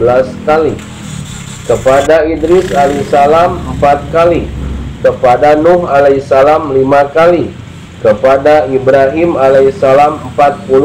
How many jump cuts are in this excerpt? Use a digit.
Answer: 0